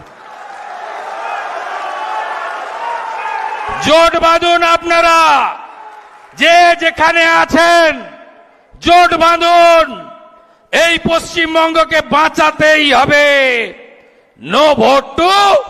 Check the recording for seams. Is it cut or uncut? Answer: uncut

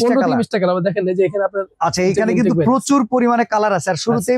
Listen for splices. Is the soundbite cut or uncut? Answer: uncut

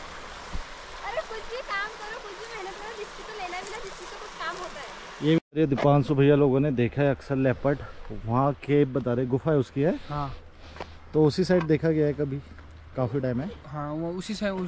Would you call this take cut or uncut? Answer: cut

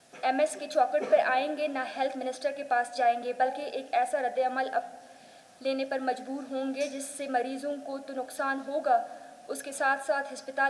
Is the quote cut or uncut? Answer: uncut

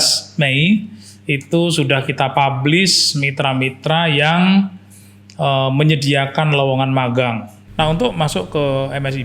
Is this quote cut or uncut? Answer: cut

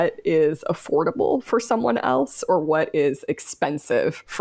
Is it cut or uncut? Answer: uncut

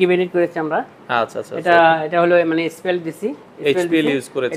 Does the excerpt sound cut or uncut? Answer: uncut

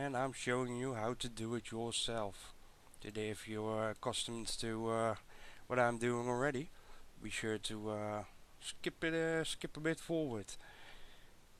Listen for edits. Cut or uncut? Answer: cut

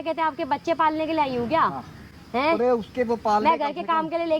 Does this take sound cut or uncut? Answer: uncut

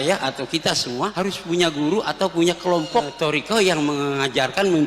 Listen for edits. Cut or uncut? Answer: cut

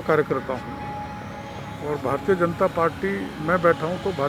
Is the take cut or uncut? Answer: uncut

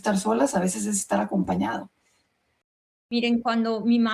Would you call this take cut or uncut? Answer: cut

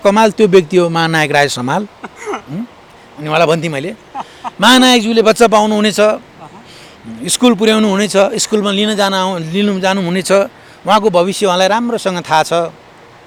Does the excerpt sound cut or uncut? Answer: uncut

